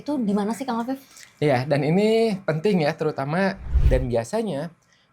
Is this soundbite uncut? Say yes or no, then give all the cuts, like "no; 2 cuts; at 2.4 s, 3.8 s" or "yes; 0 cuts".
no; 1 cut; at 3.7 s